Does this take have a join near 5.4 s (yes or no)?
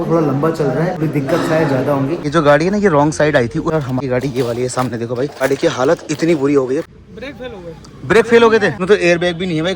yes